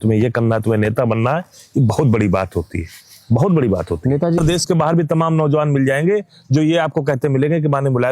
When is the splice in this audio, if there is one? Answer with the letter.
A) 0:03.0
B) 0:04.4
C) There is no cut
B